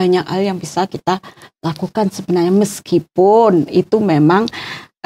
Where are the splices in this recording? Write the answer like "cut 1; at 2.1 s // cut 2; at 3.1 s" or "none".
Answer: none